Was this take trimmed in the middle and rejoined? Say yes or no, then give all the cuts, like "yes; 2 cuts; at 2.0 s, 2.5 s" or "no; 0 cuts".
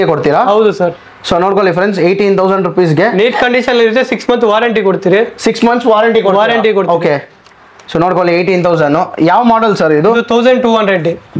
no; 0 cuts